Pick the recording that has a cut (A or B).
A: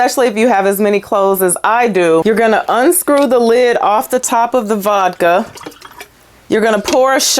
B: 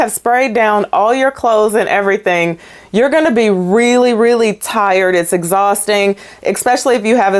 A